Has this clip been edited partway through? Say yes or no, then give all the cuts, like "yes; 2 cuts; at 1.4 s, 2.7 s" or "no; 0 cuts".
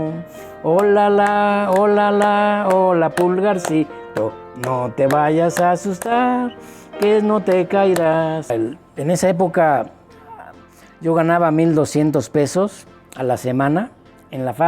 yes; 1 cut; at 8.5 s